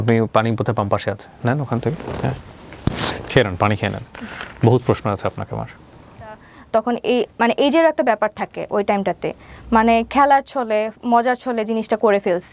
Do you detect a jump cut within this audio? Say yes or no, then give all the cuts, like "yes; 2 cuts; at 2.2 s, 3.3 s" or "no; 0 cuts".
yes; 1 cut; at 6.5 s